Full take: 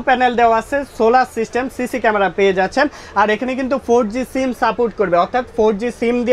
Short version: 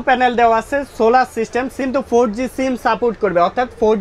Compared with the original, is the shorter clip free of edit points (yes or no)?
no